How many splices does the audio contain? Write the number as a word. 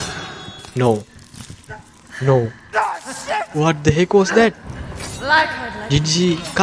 zero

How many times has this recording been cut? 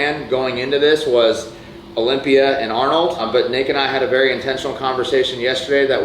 one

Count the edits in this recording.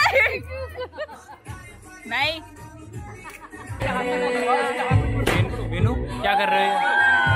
one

